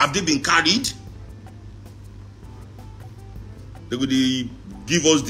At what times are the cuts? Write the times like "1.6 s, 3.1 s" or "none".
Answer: none